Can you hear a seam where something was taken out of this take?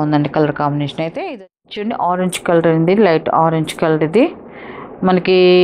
yes; 1 cut; at 1.2 s

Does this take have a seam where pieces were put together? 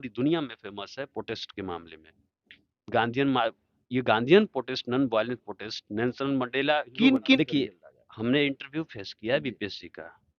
yes; 1 cut; at 7.3 s

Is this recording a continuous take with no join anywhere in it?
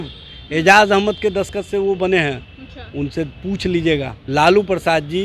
no; 1 cut; at 4.2 s

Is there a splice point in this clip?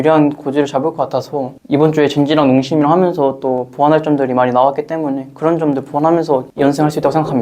yes; 1 cut; at 6.5 s

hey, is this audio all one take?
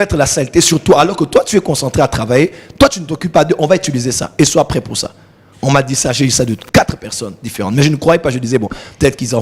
yes; 0 cuts

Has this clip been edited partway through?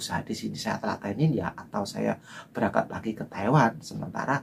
no; 0 cuts

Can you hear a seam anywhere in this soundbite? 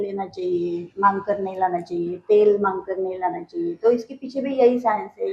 no; 0 cuts

